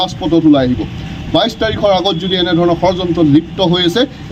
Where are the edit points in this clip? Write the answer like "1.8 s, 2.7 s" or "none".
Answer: none